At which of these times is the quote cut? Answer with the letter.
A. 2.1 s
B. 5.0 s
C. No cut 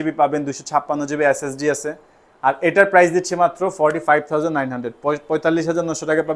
C